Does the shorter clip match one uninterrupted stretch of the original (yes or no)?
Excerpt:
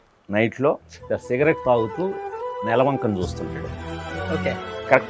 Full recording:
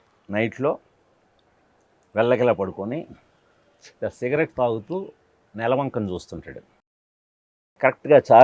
no